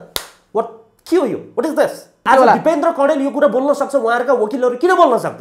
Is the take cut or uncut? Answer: cut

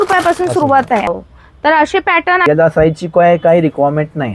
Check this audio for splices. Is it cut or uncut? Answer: cut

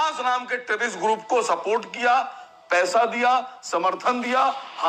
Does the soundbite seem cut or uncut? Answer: uncut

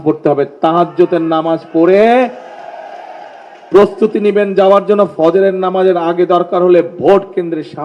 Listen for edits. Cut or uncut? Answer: uncut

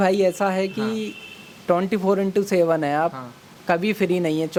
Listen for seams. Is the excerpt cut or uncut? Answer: uncut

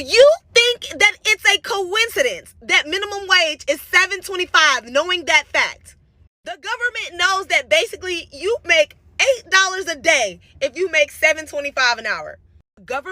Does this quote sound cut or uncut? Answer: uncut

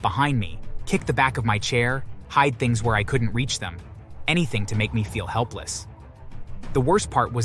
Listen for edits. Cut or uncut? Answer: uncut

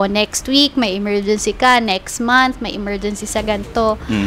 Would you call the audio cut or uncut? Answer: uncut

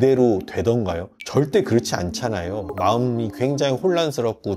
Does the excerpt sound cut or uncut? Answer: cut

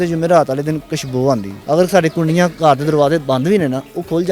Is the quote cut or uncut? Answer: cut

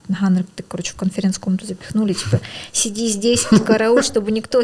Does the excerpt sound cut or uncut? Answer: uncut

